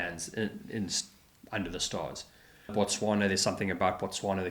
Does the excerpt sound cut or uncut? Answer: cut